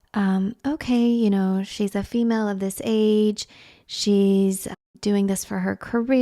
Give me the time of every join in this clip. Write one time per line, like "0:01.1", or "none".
0:04.8

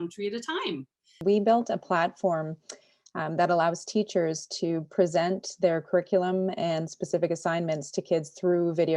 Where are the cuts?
0:01.1

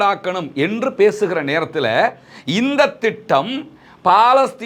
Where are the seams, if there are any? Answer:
none

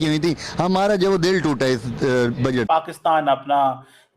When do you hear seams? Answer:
0:03.0

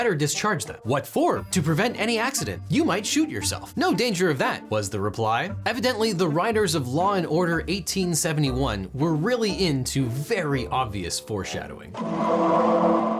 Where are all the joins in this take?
0:01.4
0:02.6
0:04.6
0:11.8

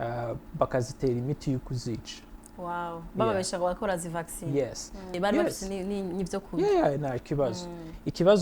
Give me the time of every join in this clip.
0:05.2

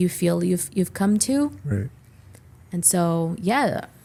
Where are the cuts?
none

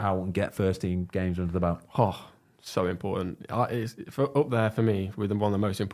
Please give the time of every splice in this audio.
none

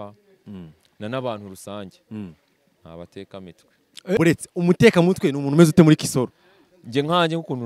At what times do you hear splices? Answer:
0:04.2

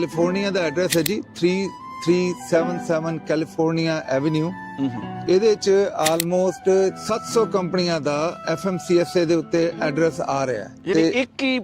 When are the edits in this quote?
0:05.1
0:07.0
0:08.4
0:10.7

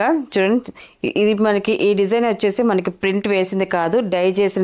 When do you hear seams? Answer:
none

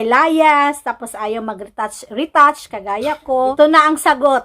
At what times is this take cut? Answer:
0:03.5

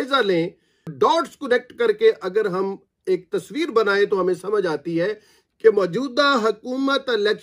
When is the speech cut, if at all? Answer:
0:00.9

